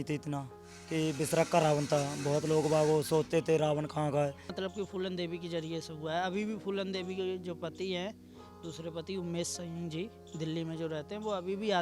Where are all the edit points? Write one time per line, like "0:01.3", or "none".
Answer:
0:04.5

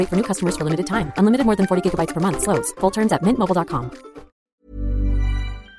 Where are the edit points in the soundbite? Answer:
0:04.4

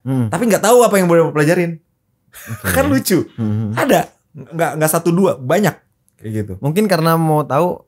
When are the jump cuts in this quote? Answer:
none

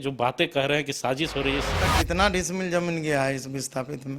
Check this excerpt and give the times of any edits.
0:01.7

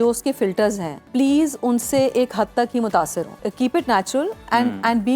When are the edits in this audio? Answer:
0:01.0
0:03.4

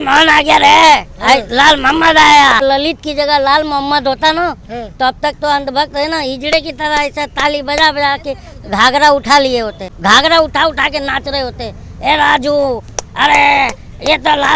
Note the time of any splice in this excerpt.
0:02.6
0:09.8

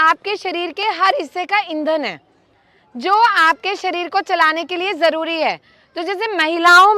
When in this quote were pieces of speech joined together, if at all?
none

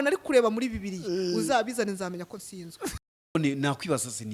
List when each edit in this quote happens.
0:03.4

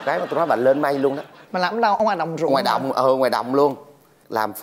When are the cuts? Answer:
none

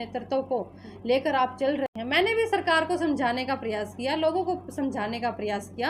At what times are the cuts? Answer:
0:01.9

